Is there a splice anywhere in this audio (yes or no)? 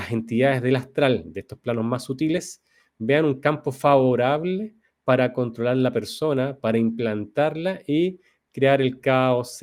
no